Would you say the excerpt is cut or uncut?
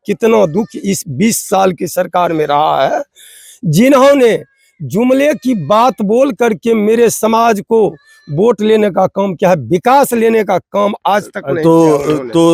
uncut